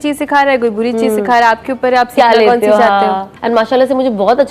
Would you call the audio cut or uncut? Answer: uncut